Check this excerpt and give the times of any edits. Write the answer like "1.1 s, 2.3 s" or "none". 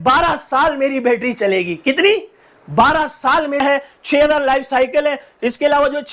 3.6 s